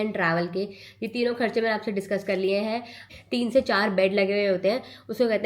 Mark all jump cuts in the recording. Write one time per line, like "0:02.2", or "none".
0:03.1

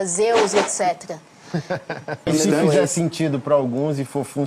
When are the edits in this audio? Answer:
0:02.3

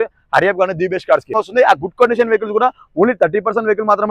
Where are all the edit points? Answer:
0:01.3

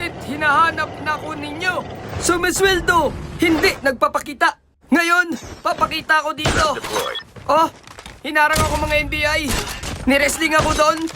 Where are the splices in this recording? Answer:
none

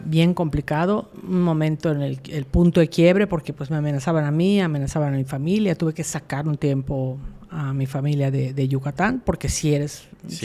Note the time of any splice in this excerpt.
none

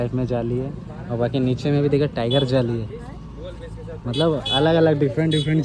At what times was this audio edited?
none

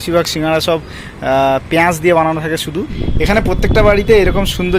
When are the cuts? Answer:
0:03.0

